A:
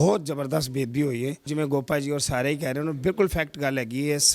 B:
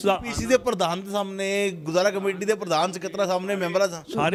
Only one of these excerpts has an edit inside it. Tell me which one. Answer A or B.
A